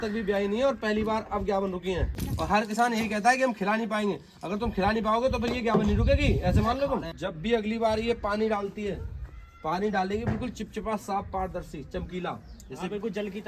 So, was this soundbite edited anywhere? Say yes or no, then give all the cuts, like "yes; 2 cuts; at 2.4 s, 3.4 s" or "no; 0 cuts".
yes; 2 cuts; at 2.3 s, 7.1 s